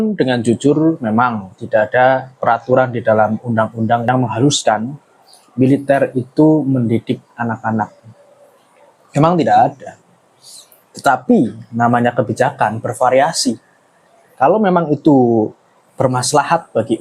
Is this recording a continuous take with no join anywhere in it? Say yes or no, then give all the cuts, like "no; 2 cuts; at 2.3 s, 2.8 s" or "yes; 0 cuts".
yes; 0 cuts